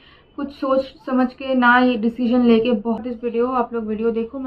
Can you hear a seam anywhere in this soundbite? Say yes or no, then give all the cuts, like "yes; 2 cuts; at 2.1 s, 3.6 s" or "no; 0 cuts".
yes; 1 cut; at 3.0 s